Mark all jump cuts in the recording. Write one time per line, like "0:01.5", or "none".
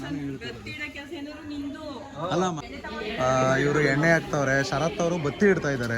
0:02.6